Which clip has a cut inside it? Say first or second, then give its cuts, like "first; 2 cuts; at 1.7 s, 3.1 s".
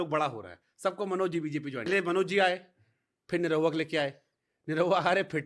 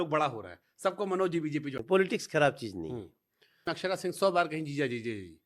second; 2 cuts; at 1.7 s, 3.7 s